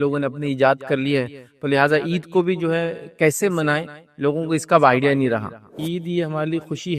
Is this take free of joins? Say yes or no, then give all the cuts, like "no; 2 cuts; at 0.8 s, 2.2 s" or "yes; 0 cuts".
no; 1 cut; at 5.8 s